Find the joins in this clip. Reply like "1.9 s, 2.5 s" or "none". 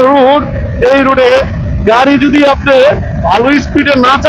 none